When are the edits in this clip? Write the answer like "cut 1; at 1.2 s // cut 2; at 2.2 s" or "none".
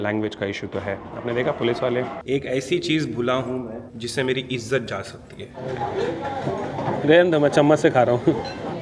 cut 1; at 2.2 s // cut 2; at 5.6 s